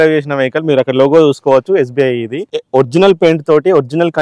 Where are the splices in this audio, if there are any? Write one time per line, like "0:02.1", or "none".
0:02.5